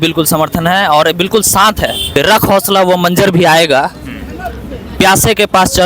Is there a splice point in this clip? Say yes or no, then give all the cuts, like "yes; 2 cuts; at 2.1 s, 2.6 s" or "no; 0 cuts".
yes; 1 cut; at 2.0 s